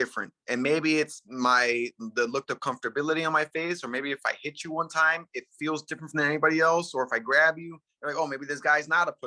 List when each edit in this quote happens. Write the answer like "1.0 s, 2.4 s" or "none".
none

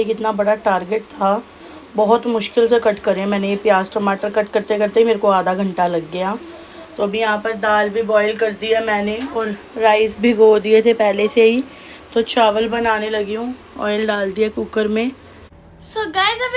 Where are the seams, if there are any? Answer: none

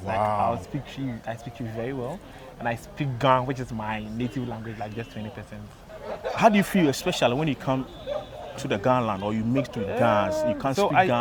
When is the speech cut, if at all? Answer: none

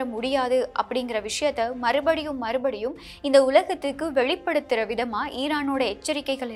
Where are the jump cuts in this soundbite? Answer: none

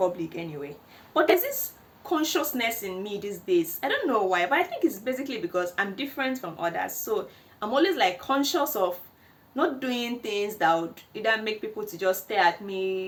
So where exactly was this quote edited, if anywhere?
none

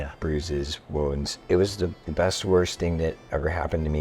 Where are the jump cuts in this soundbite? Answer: 1.3 s, 2.0 s

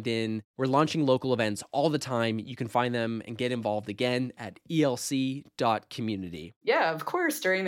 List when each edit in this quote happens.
6.5 s

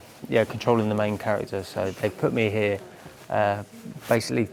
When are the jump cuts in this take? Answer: none

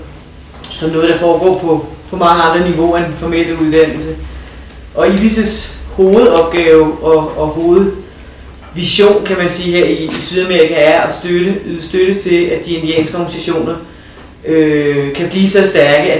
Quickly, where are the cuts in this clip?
1.5 s

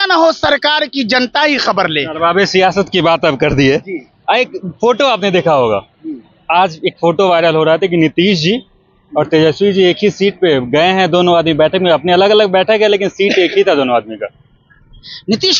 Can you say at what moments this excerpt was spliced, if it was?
none

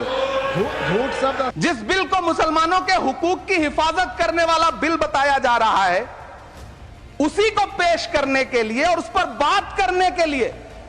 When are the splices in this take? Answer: 1.5 s

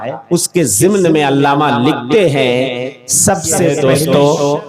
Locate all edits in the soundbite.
3.7 s

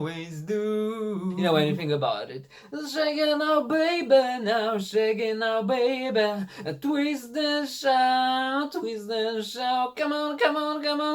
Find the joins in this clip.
1.4 s

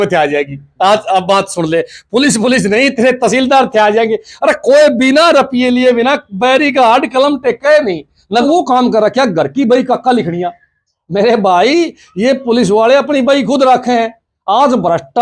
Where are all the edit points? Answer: 8.4 s

